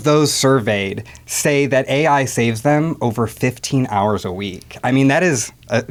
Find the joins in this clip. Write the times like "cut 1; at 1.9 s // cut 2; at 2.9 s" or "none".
none